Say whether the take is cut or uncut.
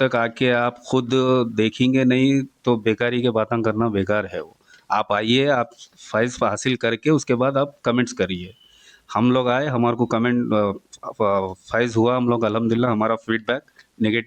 uncut